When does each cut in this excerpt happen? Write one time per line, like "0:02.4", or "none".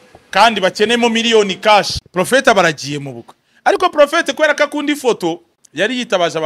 0:02.0
0:05.6

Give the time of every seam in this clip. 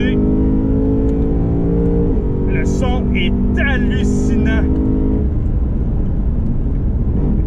none

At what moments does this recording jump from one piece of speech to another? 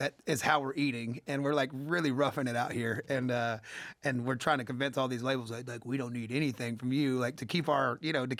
none

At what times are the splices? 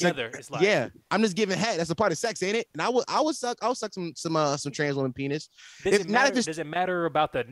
none

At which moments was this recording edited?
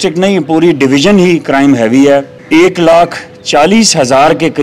0:02.3

